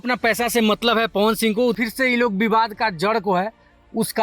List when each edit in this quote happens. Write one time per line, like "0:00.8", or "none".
0:01.8